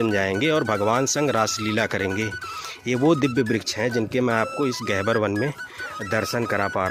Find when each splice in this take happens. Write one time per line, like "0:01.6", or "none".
none